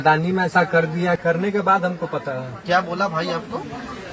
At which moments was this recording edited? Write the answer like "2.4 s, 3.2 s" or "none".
1.2 s